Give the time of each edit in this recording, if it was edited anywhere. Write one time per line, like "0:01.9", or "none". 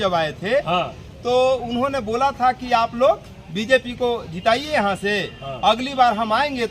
none